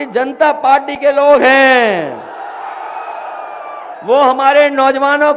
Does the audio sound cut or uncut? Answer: uncut